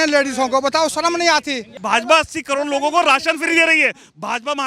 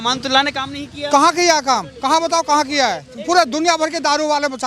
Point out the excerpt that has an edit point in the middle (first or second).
first